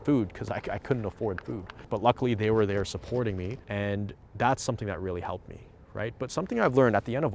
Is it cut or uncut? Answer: cut